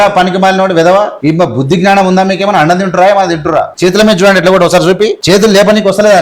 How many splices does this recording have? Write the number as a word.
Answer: three